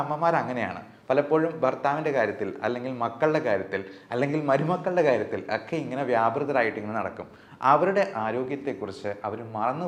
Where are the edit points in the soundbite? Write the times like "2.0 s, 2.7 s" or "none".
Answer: none